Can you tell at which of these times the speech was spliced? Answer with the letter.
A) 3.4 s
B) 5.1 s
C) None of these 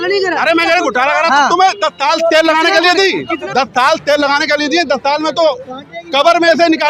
A